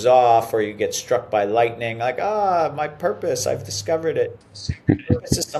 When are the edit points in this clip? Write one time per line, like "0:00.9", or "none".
none

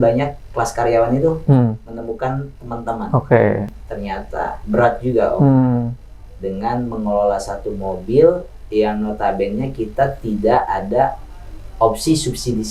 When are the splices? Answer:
0:03.8

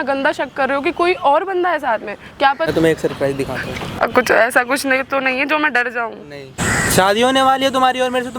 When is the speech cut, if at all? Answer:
0:02.7
0:04.0
0:06.6

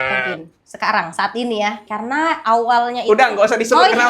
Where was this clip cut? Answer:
0:01.8

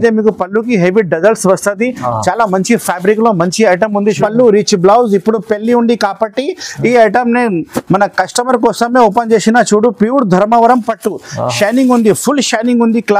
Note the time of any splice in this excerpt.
0:04.1

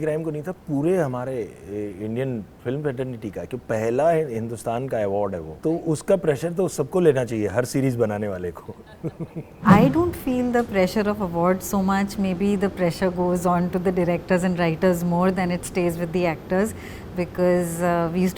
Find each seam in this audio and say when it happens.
0:05.5
0:09.6

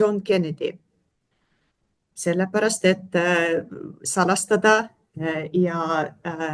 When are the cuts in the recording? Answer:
none

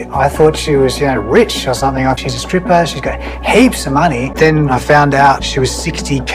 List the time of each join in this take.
0:02.2
0:04.3

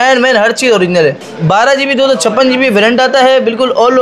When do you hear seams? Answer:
0:01.2

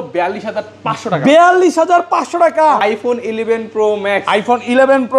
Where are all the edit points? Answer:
0:02.8

